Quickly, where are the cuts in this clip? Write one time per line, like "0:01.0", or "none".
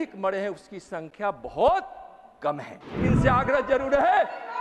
0:03.1